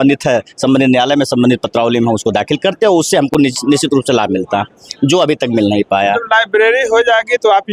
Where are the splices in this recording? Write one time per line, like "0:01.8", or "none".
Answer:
none